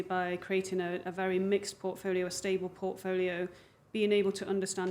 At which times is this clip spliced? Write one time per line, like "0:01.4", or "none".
none